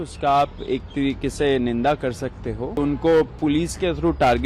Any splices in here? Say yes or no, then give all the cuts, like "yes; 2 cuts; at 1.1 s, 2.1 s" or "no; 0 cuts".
yes; 1 cut; at 2.8 s